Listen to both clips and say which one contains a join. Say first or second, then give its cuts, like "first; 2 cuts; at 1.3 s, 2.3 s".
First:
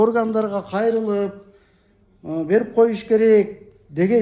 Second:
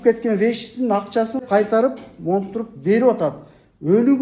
second; 1 cut; at 1.4 s